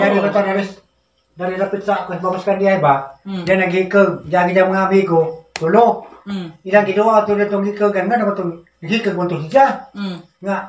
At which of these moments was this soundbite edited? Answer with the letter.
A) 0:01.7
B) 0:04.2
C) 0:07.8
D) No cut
B